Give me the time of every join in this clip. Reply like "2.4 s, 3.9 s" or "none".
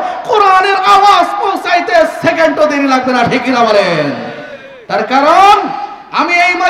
none